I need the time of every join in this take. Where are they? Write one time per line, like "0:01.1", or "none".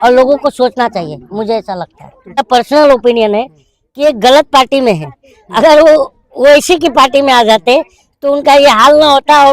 0:02.4